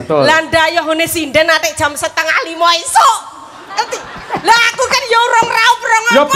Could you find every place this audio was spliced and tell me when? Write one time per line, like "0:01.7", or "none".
none

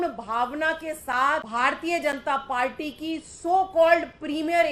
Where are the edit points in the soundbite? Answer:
0:01.5

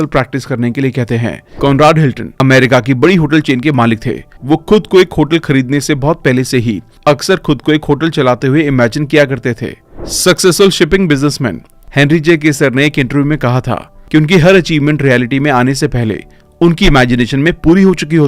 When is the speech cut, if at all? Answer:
0:01.5

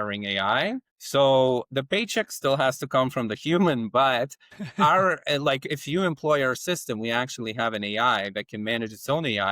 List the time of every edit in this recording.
0:00.9

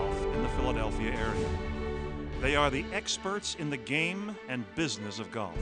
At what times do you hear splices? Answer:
none

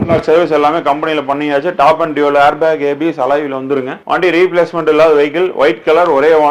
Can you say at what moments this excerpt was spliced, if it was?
0:04.0

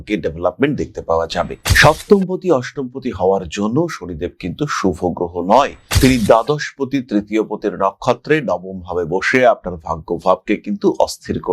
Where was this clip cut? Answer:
0:01.7

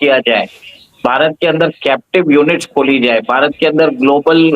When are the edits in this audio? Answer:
none

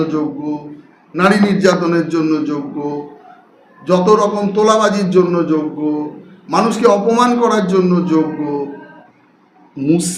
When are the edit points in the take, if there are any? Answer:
0:09.1

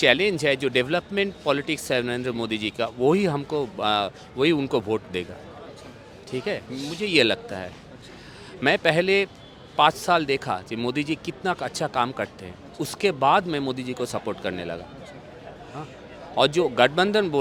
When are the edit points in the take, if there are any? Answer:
none

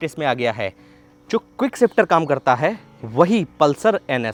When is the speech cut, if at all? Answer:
none

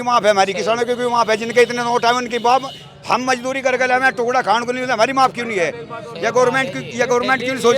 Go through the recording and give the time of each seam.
none

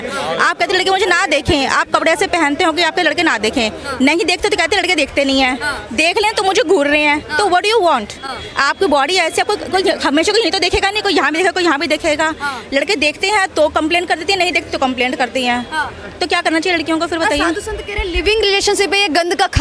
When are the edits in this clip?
none

